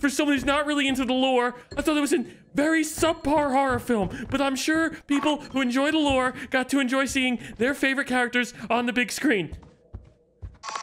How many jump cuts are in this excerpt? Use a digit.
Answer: 0